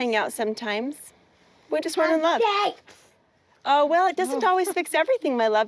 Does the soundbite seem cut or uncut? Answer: uncut